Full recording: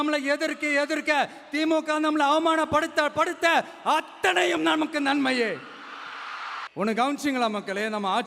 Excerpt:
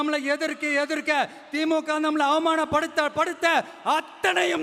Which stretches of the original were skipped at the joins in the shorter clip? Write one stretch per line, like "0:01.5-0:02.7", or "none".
none